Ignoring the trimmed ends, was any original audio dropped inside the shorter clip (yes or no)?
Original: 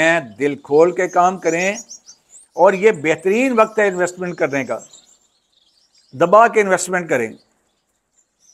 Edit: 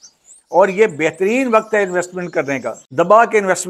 yes